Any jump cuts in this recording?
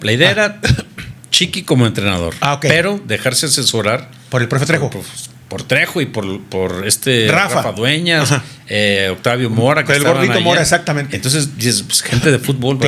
no; 0 cuts

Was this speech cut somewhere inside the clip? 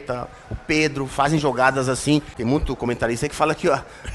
yes; 1 cut; at 2.3 s

